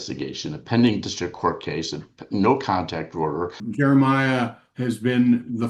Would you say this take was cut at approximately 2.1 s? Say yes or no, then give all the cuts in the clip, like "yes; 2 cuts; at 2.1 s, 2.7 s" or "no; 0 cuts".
no; 1 cut; at 3.6 s